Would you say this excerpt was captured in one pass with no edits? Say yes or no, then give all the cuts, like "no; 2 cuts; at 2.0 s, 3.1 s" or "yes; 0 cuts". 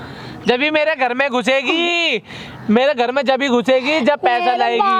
yes; 0 cuts